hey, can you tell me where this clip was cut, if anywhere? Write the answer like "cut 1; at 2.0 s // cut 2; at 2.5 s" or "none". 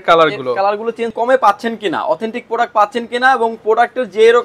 cut 1; at 1.1 s

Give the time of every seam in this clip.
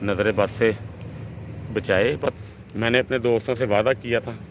cut 1; at 2.4 s

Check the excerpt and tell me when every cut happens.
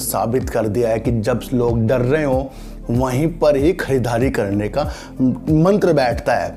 none

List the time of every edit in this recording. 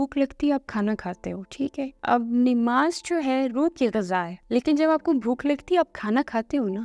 cut 1; at 2.0 s // cut 2; at 4.4 s

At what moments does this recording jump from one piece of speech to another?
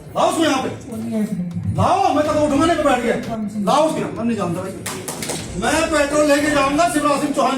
cut 1; at 5.4 s

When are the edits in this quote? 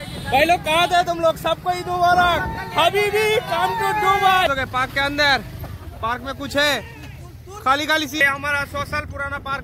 cut 1; at 4.5 s // cut 2; at 8.2 s

